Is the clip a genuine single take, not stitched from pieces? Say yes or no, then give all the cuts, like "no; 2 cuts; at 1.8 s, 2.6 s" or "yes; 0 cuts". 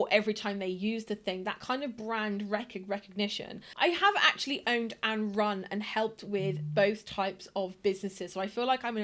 no; 1 cut; at 3.6 s